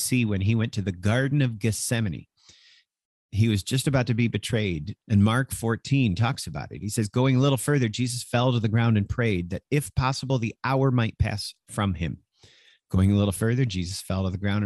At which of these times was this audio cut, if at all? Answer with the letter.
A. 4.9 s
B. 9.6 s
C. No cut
A